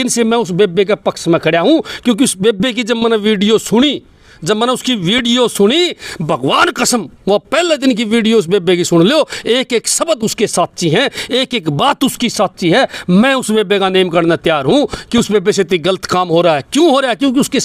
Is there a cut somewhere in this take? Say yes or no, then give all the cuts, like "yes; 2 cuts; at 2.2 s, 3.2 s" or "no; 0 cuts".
no; 0 cuts